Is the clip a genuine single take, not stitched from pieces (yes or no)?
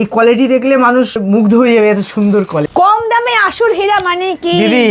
no